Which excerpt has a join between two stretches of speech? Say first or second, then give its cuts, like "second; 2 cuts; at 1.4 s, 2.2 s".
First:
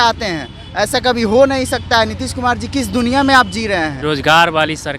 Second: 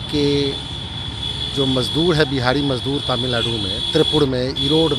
first; 1 cut; at 4.0 s